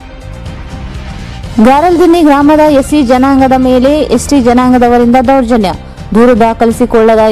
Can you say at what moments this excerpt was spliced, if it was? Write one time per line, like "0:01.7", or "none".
0:01.3